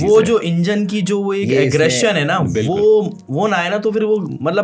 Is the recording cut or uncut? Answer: uncut